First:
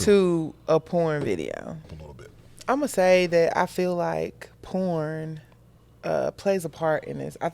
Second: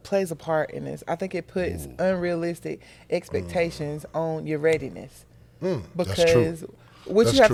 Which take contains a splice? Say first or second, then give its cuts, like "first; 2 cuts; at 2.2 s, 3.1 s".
first; 1 cut; at 1.9 s